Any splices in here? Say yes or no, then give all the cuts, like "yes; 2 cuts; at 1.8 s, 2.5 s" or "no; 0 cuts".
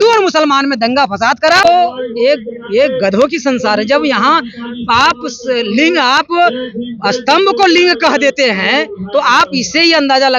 yes; 1 cut; at 1.6 s